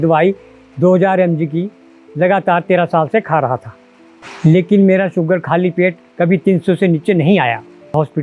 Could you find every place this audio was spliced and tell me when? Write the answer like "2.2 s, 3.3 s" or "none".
none